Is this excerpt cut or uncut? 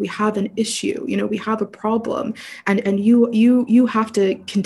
uncut